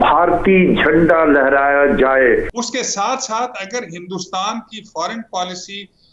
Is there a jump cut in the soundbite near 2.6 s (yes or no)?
yes